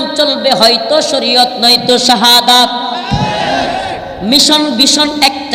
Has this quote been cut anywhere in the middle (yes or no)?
no